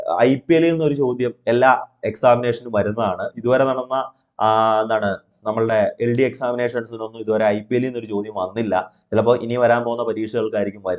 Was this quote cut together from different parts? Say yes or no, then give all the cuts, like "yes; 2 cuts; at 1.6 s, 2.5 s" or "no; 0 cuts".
no; 0 cuts